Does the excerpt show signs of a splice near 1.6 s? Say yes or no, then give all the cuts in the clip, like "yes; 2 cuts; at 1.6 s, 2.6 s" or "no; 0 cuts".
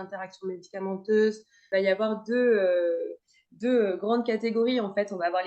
yes; 1 cut; at 1.6 s